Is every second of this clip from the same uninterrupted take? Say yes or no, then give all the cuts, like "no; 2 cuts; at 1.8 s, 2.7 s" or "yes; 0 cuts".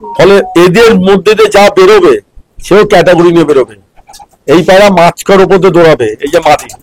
yes; 0 cuts